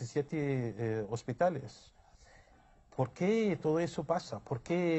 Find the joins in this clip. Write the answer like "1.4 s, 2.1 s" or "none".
none